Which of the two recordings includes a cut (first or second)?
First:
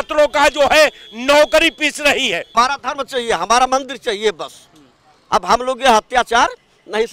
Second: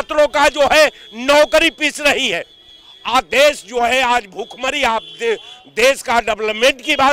first